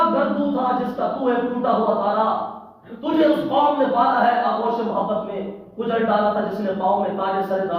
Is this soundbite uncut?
yes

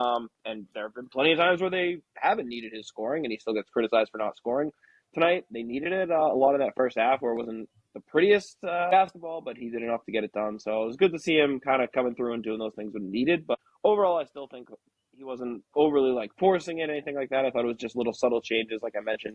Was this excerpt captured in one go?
no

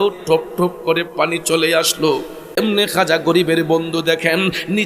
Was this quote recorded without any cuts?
no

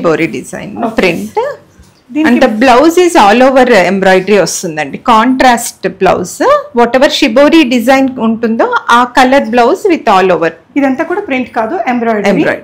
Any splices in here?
no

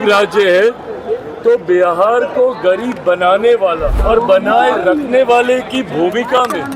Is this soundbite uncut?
no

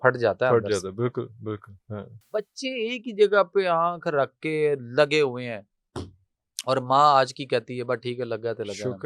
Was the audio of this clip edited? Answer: yes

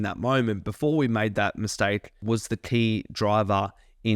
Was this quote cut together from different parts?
yes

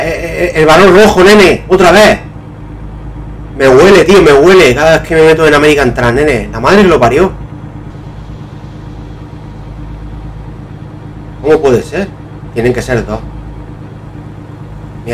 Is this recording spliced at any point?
yes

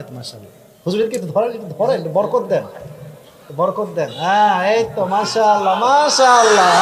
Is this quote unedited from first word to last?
yes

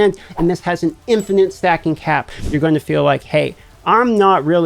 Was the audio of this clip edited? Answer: yes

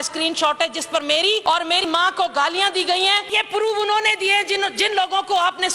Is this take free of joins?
no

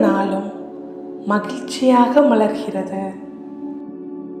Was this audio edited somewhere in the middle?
yes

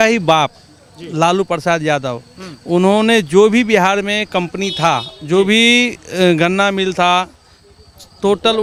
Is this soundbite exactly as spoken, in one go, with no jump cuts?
yes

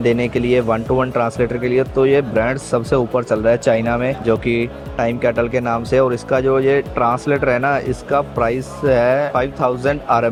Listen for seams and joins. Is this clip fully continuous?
yes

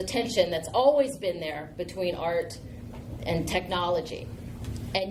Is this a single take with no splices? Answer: yes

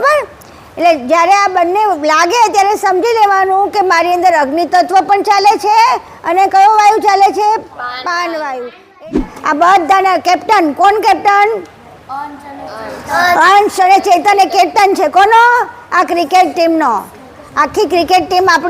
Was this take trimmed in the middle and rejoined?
yes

